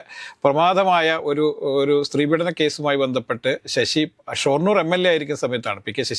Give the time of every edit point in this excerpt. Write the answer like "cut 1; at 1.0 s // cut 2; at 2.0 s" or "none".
none